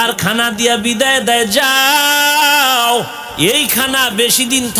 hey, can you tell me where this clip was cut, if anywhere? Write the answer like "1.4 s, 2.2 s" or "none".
3.2 s